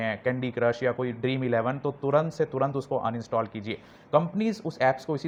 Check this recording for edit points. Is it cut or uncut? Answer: uncut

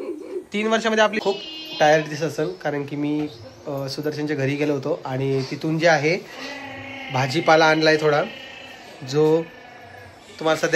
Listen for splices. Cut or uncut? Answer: cut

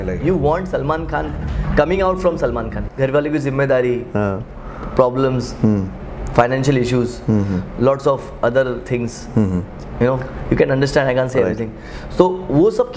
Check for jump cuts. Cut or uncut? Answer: cut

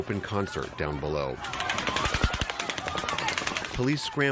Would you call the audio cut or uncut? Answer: uncut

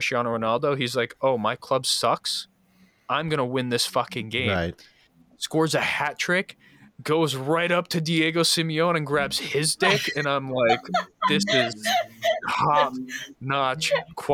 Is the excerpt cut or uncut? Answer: uncut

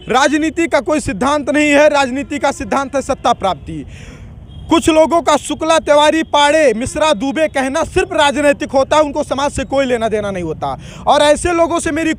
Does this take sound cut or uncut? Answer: uncut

